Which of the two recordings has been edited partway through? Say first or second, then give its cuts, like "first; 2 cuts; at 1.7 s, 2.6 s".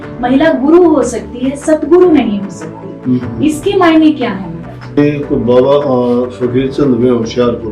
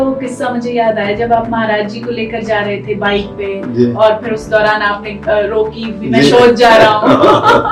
first; 1 cut; at 5.0 s